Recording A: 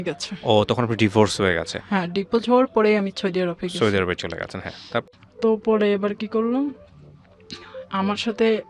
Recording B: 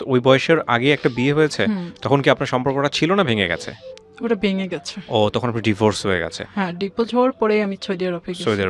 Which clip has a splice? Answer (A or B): A